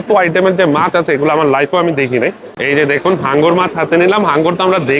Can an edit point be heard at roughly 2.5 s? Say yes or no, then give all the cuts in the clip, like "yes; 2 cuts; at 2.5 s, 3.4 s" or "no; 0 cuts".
yes; 1 cut; at 2.5 s